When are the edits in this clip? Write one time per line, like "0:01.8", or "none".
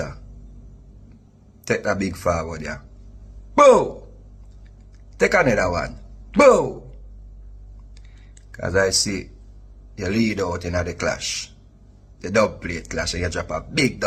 none